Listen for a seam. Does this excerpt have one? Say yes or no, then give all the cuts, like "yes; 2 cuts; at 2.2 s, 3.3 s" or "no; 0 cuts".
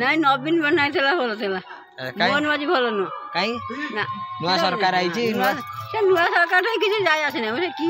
no; 0 cuts